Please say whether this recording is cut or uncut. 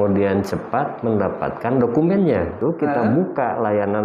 cut